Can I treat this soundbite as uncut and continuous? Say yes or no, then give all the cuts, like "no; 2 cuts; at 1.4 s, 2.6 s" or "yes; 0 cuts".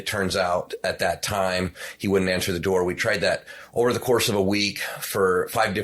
yes; 0 cuts